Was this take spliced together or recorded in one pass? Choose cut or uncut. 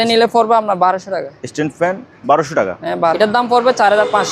cut